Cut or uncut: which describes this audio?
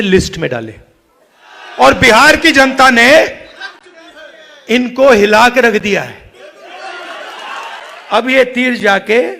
cut